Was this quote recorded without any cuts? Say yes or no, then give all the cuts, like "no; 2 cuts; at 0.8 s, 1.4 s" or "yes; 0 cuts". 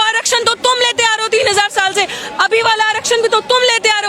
yes; 0 cuts